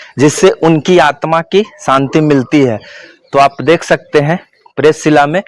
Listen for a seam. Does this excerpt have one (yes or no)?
no